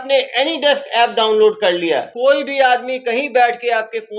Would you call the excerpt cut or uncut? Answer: cut